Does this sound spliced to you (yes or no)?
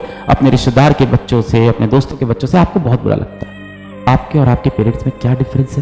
yes